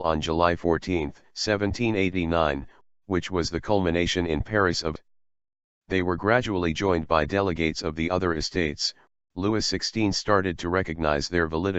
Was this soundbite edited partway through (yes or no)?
no